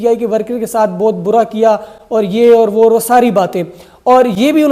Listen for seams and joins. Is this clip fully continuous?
yes; 0 cuts

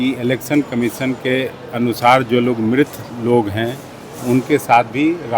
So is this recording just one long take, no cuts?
yes; 0 cuts

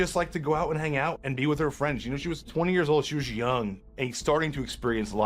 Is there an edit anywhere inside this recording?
yes; 3 cuts; at 1.2 s, 2.5 s, 3.8 s

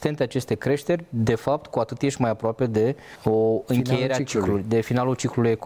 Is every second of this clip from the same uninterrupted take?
no; 1 cut; at 3.1 s

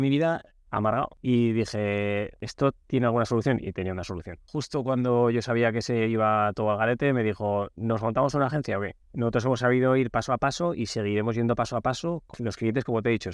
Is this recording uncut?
no; 5 cuts; at 1.1 s, 2.4 s, 4.5 s, 9.0 s, 12.3 s

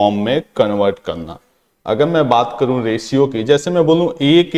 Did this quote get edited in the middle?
no; 0 cuts

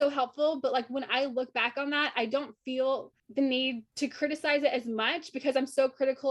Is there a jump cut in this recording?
yes; 2 cuts; at 3.2 s, 3.8 s

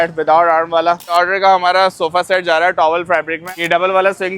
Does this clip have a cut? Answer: yes; 2 cuts; at 1.1 s, 3.5 s

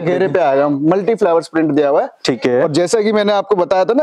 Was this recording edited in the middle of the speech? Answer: no; 0 cuts

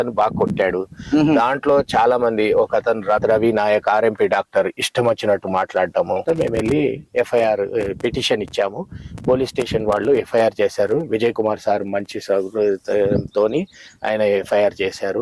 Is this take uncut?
no; 2 cuts; at 3.2 s, 6.2 s

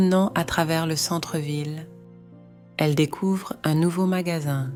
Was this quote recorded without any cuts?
yes; 0 cuts

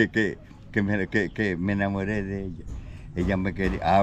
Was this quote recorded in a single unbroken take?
yes; 0 cuts

